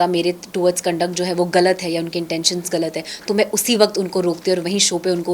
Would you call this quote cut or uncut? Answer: uncut